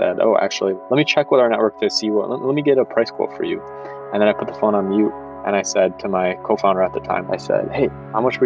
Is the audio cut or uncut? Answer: cut